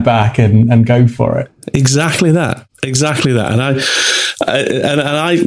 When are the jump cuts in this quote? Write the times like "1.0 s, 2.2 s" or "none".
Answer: none